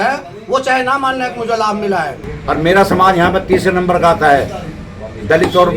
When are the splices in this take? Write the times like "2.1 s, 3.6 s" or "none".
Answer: 2.3 s